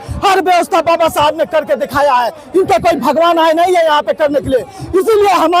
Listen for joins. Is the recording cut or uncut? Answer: uncut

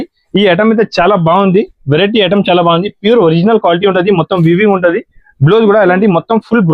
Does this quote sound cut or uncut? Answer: uncut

